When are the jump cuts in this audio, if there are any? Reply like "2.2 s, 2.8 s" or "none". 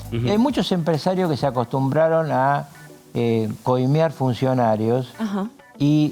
none